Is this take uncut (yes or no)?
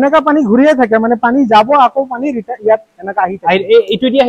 yes